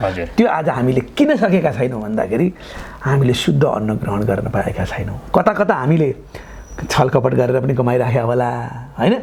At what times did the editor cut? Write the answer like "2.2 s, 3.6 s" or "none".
none